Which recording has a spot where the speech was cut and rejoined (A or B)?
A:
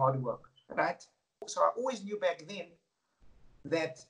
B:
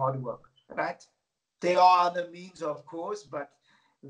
A